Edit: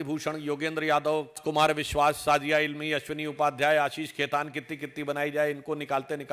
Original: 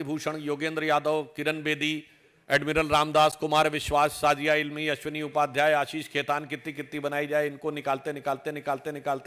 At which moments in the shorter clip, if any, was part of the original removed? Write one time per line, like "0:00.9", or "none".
0:01.4

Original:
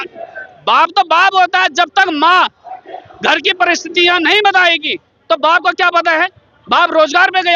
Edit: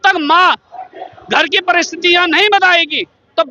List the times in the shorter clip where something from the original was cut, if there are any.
none

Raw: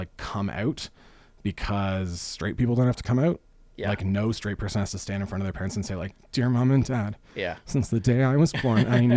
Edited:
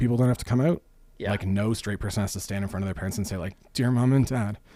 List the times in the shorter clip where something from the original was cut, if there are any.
none

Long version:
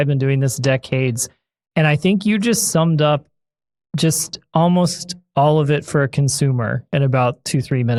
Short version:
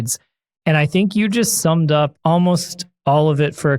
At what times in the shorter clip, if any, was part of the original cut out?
0:02.2

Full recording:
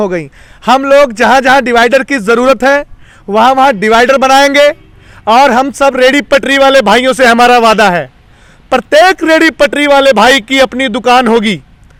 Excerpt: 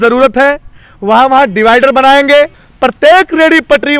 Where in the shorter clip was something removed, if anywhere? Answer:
0:02.6

